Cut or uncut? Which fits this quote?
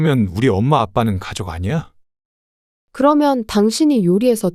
uncut